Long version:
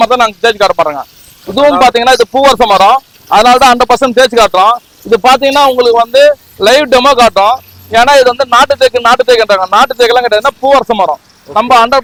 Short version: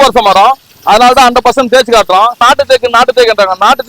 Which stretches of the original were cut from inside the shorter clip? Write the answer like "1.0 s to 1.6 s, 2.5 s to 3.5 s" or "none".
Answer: 4.8 s to 8.5 s